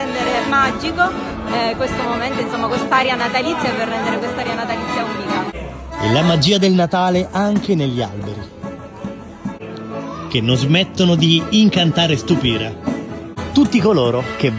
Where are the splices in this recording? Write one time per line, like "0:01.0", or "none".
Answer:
none

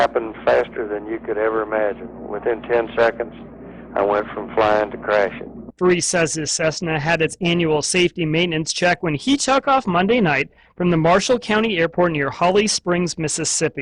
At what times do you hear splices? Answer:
none

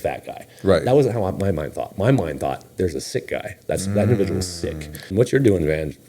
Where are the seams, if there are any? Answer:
0:05.0

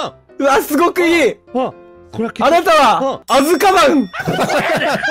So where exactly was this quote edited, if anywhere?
0:03.2
0:04.2

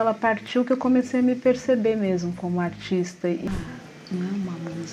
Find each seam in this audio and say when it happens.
0:03.5

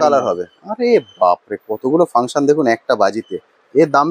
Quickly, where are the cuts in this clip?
none

